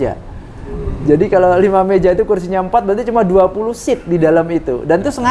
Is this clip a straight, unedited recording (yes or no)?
yes